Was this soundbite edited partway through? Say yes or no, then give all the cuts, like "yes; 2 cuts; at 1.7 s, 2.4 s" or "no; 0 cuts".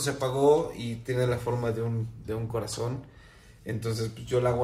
no; 0 cuts